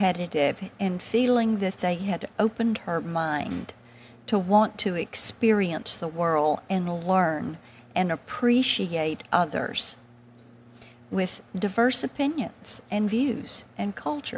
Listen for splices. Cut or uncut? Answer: uncut